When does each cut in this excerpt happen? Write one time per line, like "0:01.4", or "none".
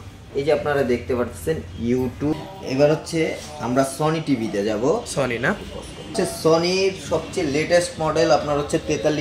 0:02.3
0:06.1